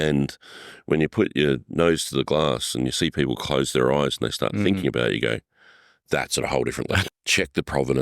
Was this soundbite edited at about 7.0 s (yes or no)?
yes